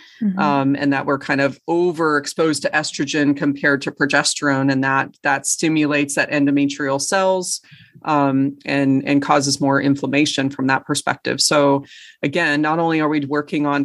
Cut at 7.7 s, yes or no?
no